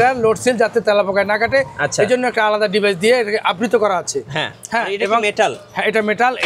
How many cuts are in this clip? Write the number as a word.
zero